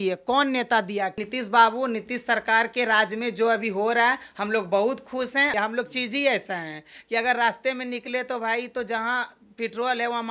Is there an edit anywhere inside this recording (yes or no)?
yes